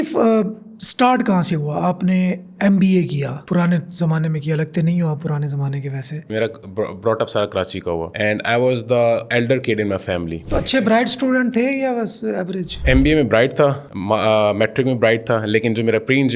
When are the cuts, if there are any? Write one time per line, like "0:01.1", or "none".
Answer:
0:06.2
0:10.4